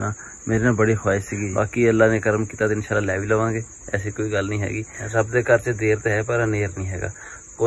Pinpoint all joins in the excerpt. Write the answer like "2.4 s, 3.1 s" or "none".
1.5 s